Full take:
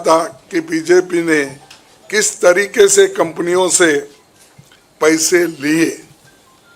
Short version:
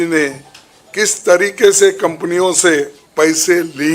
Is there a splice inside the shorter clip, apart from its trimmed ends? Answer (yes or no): yes